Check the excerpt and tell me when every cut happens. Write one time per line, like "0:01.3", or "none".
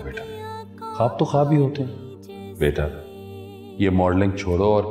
none